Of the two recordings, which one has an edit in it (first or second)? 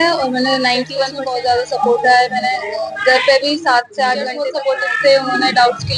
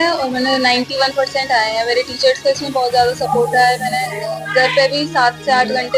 first